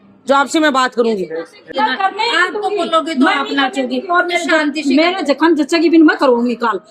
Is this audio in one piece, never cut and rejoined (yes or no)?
no